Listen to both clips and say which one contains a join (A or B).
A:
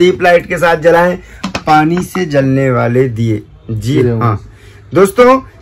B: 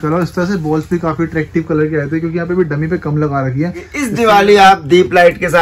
B